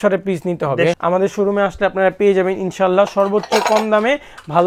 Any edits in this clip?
yes; 1 cut; at 1.0 s

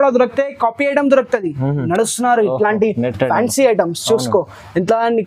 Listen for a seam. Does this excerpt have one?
yes; 1 cut; at 1.8 s

